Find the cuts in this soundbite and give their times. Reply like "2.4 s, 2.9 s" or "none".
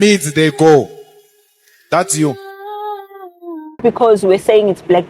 3.8 s

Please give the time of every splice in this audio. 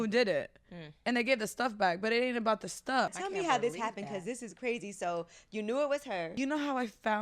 3.1 s, 6.3 s

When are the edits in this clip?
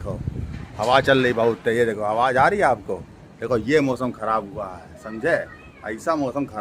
none

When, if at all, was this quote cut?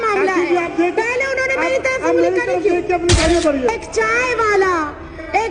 3.2 s

